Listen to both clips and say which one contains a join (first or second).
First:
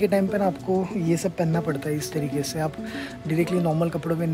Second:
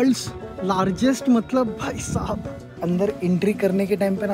second